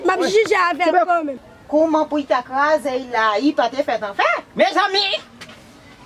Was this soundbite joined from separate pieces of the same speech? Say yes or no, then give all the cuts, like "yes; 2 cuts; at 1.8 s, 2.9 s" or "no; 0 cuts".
yes; 1 cut; at 1.4 s